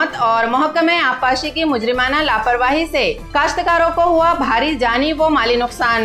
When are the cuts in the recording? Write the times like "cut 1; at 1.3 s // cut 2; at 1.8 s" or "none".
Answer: none